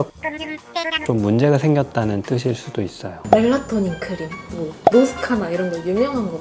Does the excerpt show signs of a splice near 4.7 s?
no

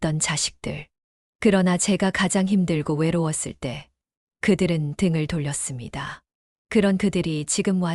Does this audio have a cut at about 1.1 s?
no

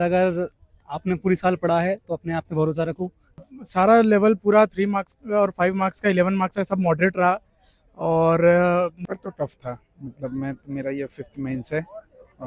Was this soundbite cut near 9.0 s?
yes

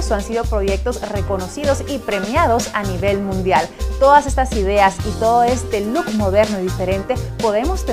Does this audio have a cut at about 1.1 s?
no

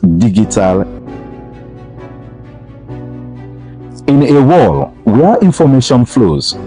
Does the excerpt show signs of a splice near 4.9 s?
no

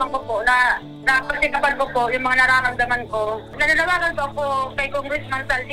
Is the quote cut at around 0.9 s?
no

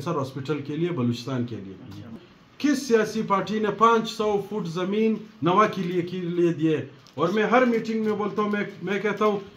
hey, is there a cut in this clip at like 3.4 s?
no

